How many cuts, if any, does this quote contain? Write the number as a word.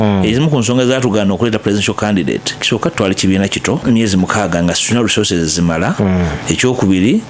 three